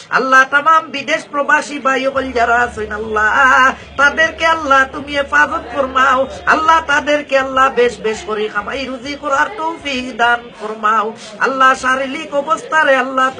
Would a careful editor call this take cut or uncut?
uncut